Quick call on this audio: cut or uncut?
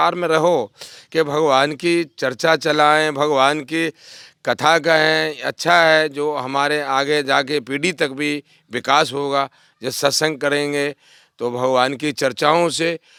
uncut